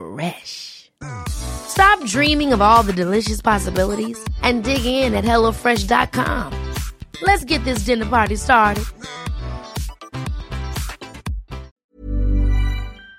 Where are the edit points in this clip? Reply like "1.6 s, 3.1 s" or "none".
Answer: 11.8 s